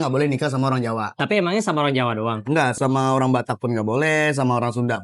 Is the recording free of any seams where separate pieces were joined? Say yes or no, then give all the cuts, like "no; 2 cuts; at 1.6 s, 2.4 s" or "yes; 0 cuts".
no; 2 cuts; at 1.1 s, 2.7 s